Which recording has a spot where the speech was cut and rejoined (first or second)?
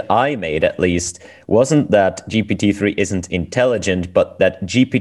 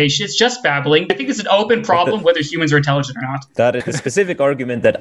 second